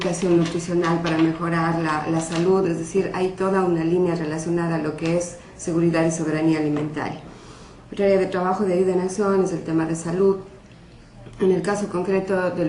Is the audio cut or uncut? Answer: uncut